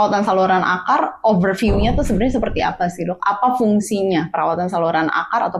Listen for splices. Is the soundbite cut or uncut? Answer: uncut